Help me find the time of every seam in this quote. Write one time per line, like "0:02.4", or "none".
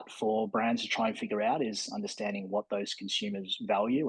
none